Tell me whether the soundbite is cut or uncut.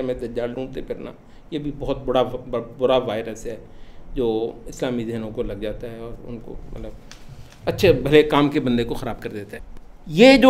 cut